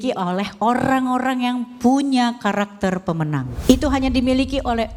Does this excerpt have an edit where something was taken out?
yes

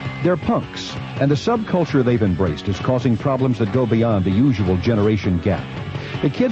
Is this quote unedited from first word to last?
yes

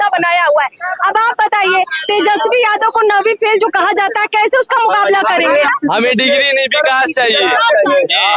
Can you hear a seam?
yes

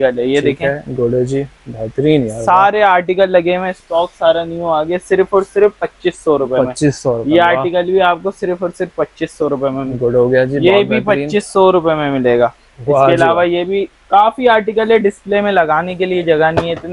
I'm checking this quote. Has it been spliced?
no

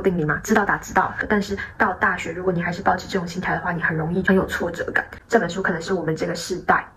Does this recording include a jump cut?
yes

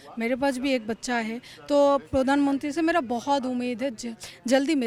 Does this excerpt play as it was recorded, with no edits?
yes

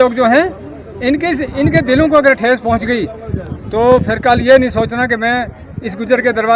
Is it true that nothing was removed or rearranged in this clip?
yes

